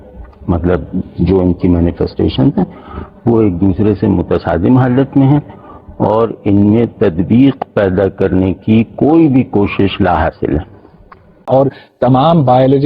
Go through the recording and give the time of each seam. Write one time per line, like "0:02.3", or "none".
0:11.5